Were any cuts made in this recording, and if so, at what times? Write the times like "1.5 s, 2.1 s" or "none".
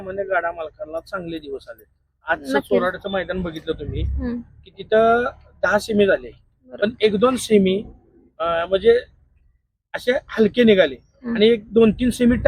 none